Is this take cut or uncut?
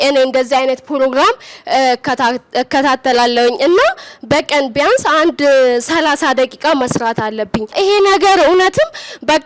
cut